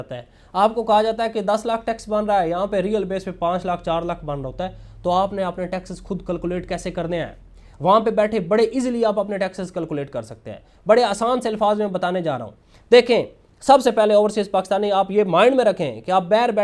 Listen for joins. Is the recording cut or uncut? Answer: uncut